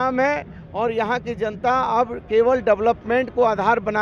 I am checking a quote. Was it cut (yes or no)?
no